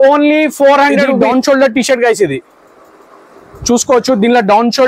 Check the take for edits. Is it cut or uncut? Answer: cut